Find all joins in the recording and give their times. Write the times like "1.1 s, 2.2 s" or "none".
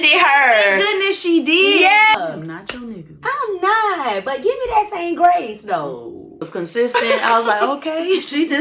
2.1 s, 6.5 s